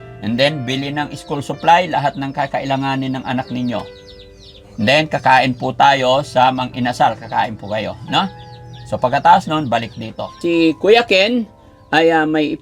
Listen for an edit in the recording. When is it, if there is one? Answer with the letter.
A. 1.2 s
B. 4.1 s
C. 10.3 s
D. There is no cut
C